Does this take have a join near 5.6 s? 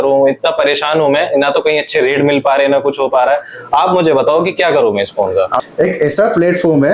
yes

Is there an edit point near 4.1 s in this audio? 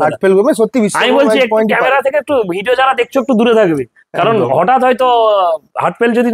no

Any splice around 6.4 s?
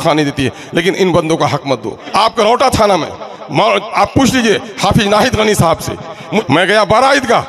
yes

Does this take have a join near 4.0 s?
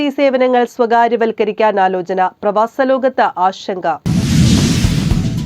yes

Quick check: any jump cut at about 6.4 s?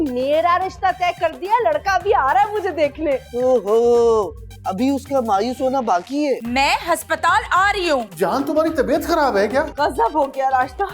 yes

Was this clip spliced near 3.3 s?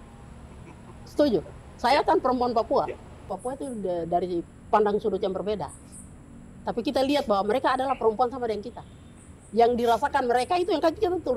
yes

